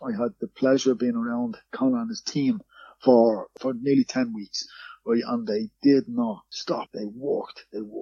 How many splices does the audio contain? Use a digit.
3